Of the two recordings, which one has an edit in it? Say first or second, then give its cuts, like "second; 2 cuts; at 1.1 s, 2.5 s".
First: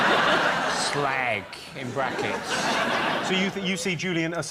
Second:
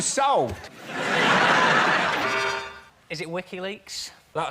second; 1 cut; at 2.2 s